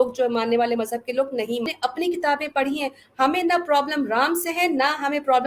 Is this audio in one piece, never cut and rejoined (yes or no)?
no